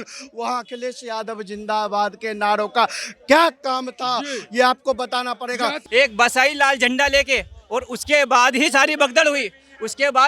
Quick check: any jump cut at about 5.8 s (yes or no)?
yes